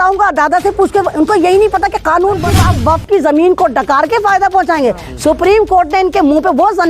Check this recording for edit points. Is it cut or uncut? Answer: cut